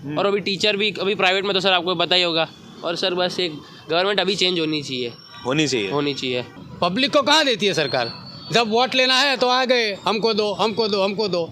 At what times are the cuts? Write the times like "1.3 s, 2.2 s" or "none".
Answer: 2.7 s, 6.6 s